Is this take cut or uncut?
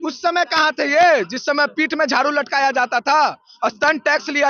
uncut